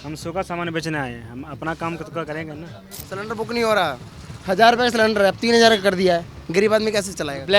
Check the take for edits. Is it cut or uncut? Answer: cut